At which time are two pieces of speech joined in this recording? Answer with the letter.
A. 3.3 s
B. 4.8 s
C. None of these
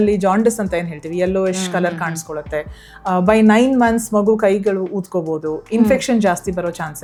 C